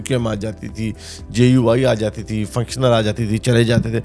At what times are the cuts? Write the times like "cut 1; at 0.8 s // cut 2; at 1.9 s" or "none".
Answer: none